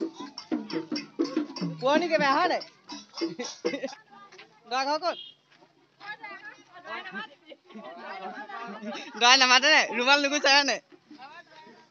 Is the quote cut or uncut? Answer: cut